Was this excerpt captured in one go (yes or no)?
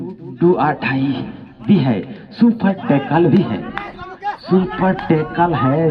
yes